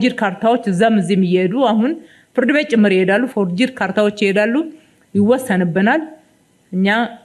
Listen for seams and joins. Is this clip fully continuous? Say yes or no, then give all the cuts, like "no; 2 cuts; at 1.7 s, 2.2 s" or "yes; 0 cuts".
yes; 0 cuts